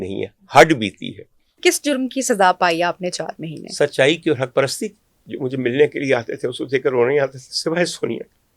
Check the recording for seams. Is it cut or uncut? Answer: cut